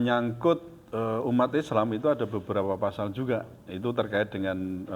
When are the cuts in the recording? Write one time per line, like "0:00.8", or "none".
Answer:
none